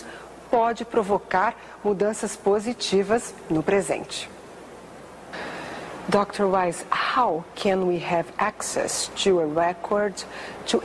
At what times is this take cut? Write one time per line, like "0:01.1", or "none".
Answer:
0:02.5